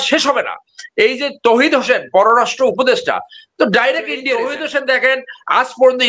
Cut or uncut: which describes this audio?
cut